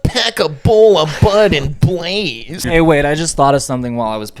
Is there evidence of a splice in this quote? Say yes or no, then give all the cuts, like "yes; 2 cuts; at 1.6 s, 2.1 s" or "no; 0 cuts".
yes; 1 cut; at 2.6 s